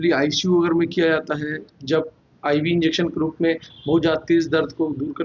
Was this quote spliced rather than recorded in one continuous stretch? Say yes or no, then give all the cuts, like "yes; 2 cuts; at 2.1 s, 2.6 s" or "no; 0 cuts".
no; 0 cuts